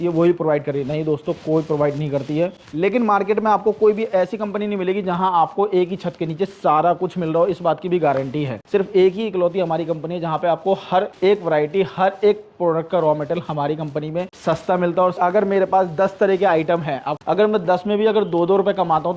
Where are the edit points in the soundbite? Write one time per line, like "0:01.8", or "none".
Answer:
0:02.6
0:08.5
0:11.1
0:14.3
0:15.2
0:17.1